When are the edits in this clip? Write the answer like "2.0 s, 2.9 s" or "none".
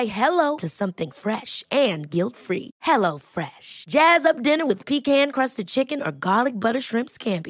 none